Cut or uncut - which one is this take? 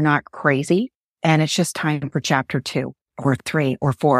cut